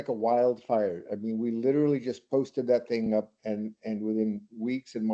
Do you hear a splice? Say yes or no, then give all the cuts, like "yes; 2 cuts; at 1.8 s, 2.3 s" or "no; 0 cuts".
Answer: no; 0 cuts